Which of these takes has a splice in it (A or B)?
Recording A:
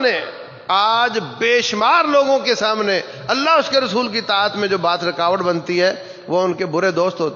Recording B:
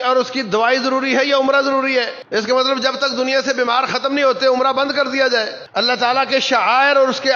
B